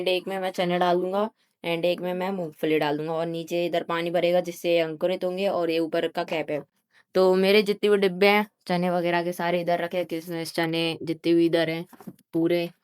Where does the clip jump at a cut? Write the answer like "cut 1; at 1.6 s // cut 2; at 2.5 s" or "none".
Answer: none